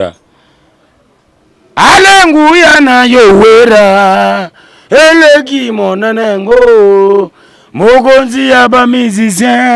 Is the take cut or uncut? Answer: uncut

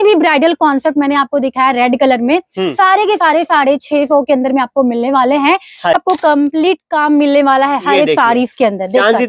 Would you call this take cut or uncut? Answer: cut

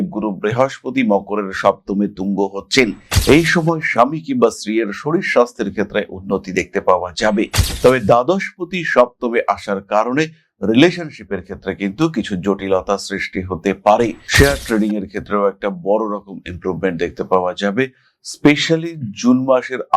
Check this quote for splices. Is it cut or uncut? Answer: cut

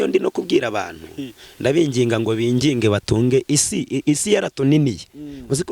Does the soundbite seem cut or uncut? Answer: uncut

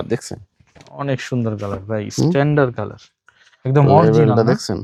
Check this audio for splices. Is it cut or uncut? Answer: uncut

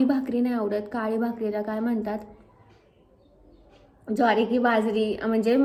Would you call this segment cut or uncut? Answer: uncut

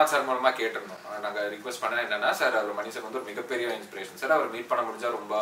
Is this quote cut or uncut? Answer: uncut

